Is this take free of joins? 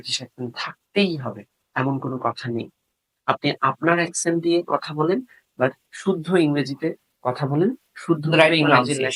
yes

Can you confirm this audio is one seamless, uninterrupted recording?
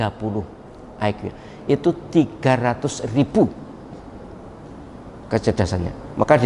yes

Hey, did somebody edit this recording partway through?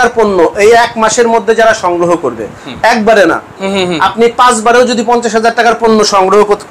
no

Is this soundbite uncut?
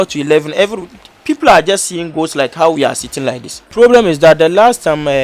no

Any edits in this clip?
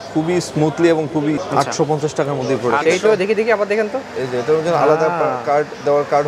yes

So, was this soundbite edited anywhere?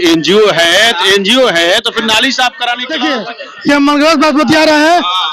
yes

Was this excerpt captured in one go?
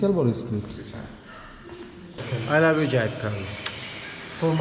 no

